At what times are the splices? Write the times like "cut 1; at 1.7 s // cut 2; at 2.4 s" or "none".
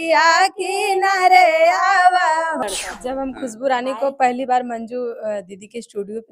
cut 1; at 2.6 s

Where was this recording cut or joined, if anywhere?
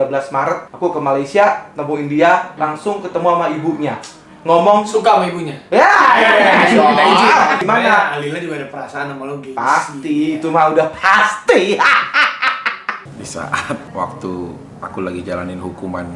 cut 1; at 2.5 s // cut 2; at 7.6 s // cut 3; at 13.0 s

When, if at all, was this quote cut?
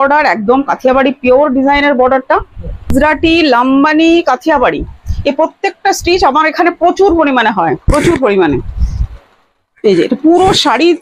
cut 1; at 2.9 s

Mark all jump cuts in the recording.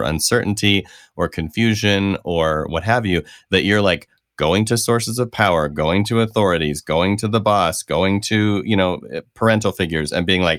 none

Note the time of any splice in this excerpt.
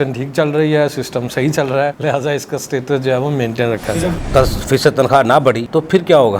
cut 1; at 4.1 s

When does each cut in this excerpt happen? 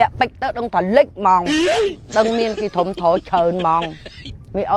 cut 1; at 1.5 s

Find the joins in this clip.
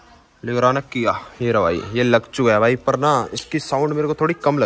none

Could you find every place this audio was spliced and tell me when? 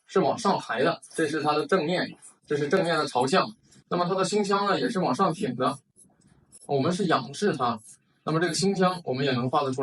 cut 1; at 1.1 s

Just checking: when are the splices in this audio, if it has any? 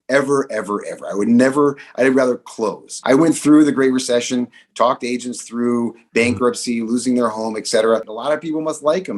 cut 1; at 2.9 s

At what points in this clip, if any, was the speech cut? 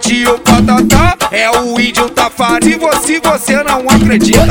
cut 1; at 2.4 s

